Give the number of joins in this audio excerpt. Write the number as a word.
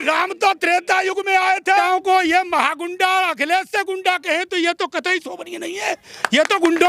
one